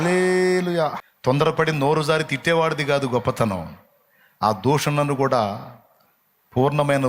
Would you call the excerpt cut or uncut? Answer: cut